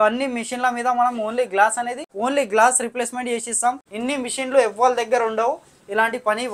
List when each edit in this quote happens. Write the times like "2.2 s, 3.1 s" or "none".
2.0 s, 3.9 s